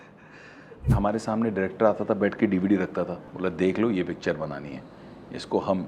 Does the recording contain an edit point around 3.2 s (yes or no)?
yes